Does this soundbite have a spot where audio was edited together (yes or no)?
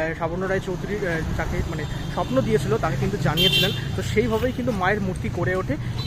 no